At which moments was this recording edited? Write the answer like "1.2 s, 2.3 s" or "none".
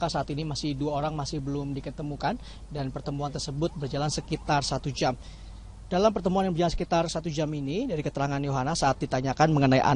none